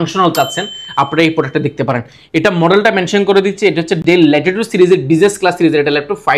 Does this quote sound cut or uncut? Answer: uncut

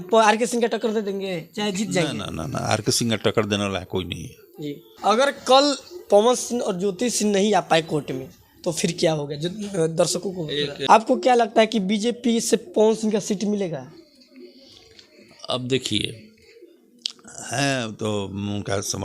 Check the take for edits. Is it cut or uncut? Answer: cut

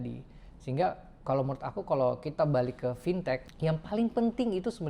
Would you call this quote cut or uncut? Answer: cut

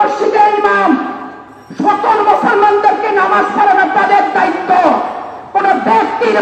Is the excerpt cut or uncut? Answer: uncut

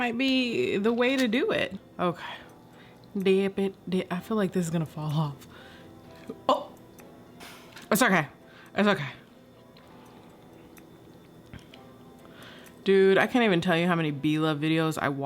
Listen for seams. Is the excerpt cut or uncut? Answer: cut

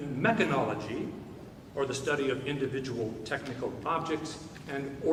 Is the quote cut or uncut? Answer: uncut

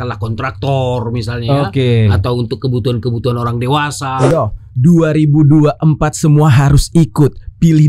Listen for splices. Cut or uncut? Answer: cut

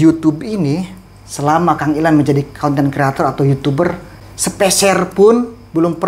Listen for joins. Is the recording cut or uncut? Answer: uncut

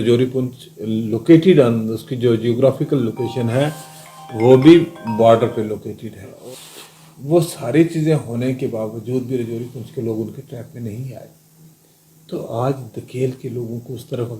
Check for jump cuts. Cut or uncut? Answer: cut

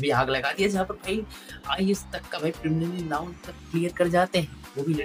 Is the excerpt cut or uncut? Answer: uncut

